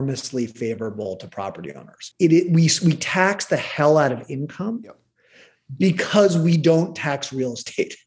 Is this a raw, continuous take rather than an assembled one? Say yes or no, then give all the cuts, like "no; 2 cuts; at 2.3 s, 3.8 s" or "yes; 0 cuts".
no; 1 cut; at 2.0 s